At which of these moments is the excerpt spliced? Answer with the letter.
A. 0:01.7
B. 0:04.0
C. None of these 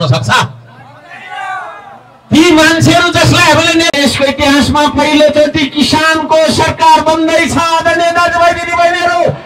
B